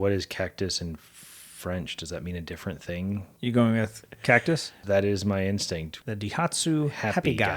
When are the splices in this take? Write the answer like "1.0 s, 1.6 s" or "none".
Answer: 3.3 s, 4.8 s, 5.9 s